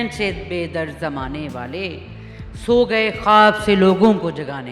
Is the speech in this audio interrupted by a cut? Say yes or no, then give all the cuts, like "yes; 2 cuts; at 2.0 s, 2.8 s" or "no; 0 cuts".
no; 0 cuts